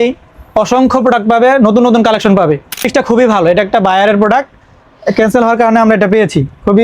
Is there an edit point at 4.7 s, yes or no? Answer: no